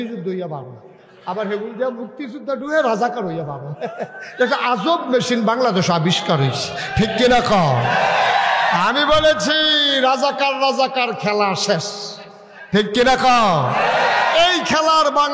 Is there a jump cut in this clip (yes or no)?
no